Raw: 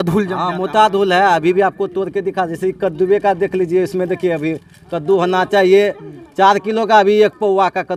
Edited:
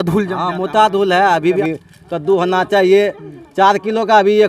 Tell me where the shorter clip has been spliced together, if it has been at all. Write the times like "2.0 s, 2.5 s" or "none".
1.6 s